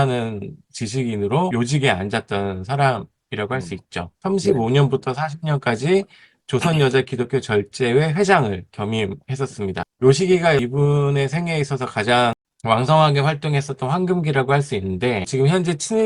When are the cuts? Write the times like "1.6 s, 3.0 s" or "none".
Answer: 1.5 s, 4.1 s, 9.8 s, 10.6 s, 12.5 s, 15.3 s